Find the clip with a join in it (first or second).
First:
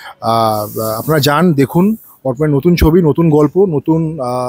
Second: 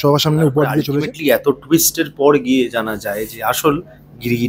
second